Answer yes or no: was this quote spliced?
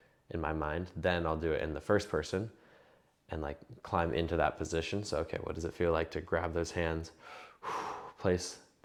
no